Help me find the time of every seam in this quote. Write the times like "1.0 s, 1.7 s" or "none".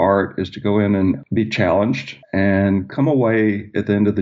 1.2 s